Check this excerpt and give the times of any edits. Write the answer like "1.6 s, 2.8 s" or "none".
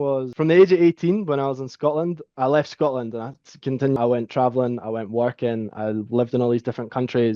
none